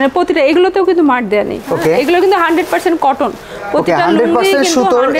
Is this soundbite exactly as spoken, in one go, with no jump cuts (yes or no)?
no